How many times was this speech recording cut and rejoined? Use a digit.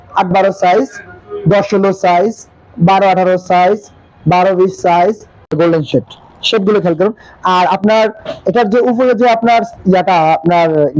1